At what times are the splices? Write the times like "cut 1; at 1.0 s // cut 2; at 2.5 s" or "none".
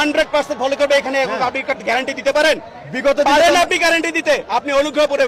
none

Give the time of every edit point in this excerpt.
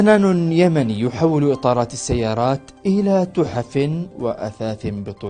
none

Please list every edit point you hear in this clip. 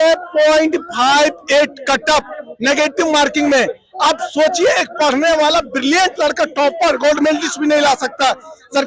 none

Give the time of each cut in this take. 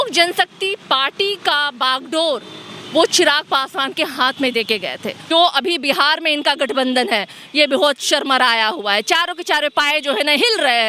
cut 1; at 5.3 s

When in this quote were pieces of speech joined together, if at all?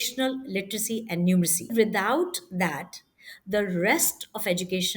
cut 1; at 1.7 s

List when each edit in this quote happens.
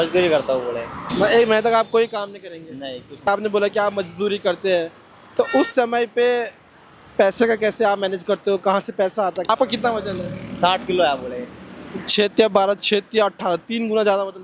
cut 1; at 1.1 s // cut 2; at 3.3 s // cut 3; at 9.5 s

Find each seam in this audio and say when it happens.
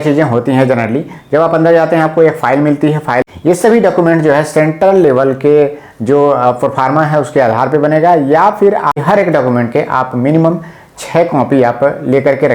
cut 1; at 3.3 s // cut 2; at 9.0 s

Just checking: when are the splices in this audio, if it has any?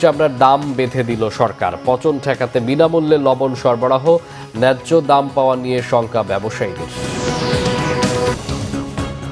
cut 1; at 8.3 s

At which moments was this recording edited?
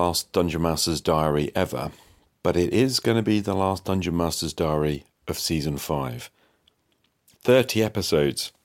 none

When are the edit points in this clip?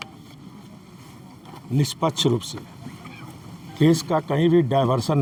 none

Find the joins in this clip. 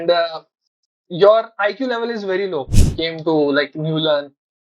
cut 1; at 2.8 s

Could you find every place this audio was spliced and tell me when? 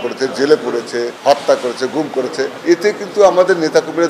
cut 1; at 1.1 s // cut 2; at 2.6 s

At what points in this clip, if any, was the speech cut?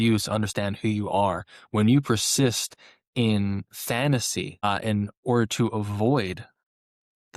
cut 1; at 4.6 s

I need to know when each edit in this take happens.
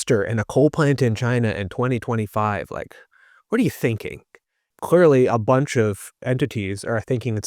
cut 1; at 4.8 s // cut 2; at 6.1 s

